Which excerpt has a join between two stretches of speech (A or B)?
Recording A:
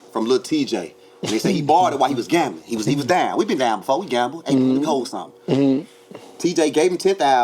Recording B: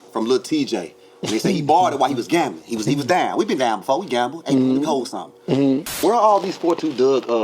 B